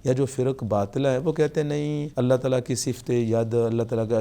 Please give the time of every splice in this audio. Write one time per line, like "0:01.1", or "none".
0:02.0